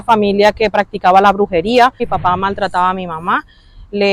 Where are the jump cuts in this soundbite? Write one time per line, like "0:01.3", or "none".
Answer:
0:02.1